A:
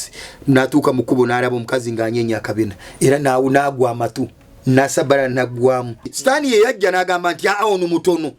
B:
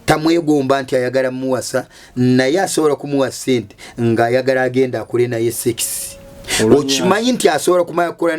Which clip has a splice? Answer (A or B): A